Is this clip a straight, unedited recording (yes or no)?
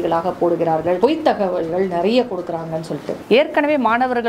no